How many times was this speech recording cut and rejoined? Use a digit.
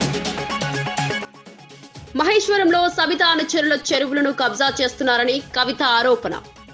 1